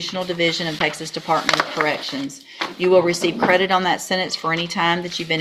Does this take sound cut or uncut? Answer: uncut